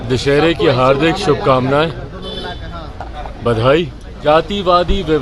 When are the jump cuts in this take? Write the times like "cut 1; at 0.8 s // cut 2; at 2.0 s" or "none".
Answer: cut 1; at 4.3 s